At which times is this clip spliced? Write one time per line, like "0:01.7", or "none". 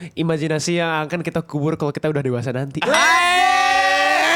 none